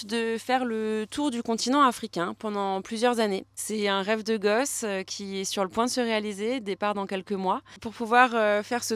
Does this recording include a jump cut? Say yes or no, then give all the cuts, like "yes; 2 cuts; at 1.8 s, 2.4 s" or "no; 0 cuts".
yes; 2 cuts; at 3.5 s, 7.9 s